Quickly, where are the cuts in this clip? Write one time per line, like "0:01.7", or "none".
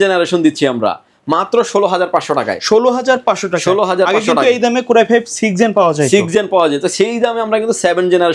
none